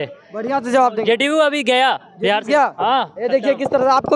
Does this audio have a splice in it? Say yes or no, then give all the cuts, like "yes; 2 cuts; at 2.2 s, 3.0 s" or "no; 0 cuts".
no; 0 cuts